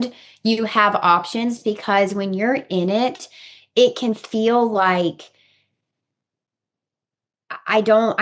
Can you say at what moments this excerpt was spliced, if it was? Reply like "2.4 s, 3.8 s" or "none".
none